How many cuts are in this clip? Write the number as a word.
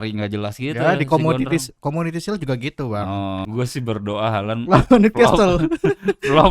one